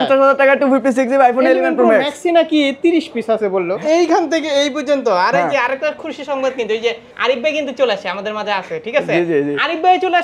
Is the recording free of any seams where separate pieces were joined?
no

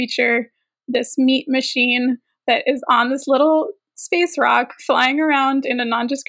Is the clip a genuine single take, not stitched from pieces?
yes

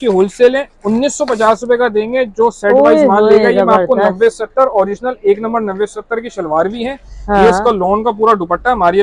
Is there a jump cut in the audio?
no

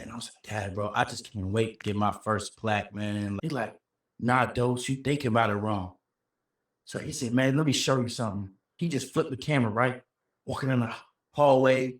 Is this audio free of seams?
no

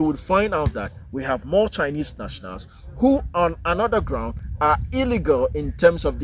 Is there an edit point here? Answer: no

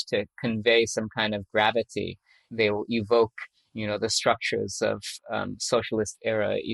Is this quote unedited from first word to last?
no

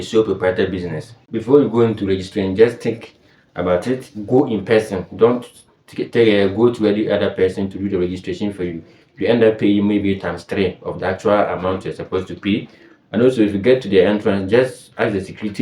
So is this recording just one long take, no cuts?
no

